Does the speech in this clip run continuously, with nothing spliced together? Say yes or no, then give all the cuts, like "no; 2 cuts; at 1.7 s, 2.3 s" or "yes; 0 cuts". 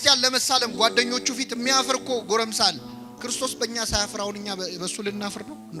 yes; 0 cuts